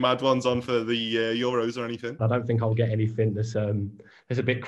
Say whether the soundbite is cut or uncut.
cut